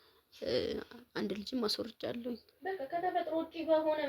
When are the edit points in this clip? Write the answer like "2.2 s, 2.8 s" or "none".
2.5 s

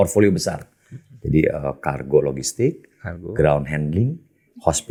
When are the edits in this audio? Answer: none

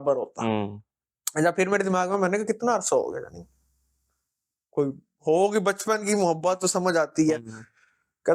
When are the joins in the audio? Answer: none

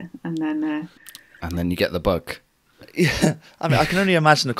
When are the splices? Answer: 1.0 s

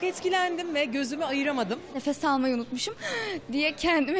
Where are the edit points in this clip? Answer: 2.0 s

